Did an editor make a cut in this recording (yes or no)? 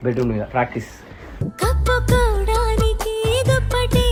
no